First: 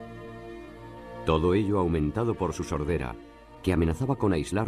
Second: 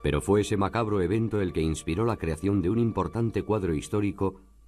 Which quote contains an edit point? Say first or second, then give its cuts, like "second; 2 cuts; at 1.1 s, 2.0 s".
first; 1 cut; at 2.5 s